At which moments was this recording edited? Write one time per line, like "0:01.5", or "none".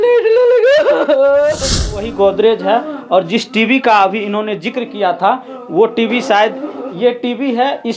0:01.9